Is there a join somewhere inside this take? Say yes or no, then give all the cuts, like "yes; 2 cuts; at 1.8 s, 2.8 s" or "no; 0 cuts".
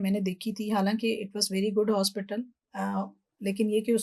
no; 0 cuts